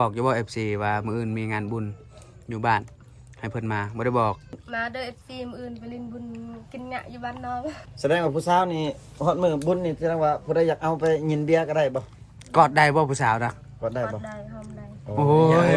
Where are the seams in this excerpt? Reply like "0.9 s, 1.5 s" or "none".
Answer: 4.7 s, 7.9 s